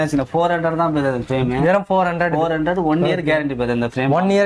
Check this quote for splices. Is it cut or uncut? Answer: uncut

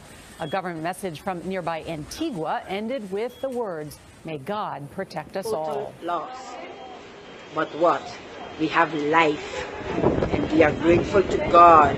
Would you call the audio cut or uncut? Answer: cut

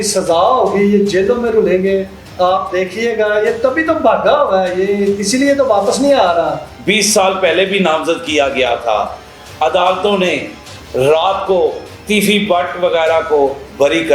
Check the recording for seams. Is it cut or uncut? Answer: cut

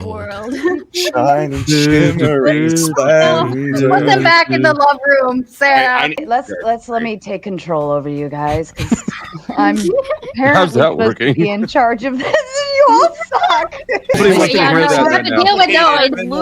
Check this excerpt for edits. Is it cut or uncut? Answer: cut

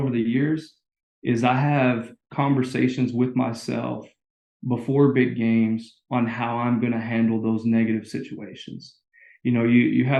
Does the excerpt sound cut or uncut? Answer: uncut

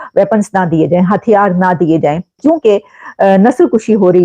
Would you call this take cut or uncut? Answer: cut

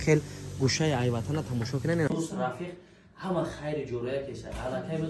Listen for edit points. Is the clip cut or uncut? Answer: cut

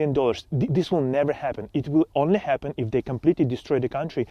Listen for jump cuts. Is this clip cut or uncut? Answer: uncut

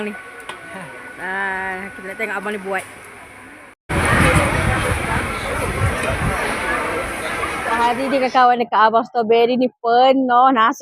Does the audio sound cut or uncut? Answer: cut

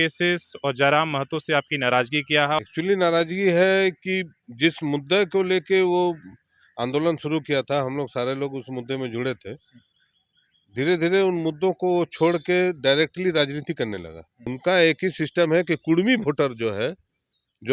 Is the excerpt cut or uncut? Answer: cut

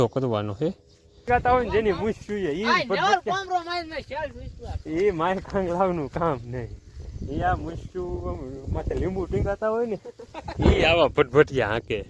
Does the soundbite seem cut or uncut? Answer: cut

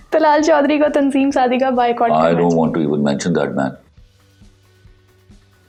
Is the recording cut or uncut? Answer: uncut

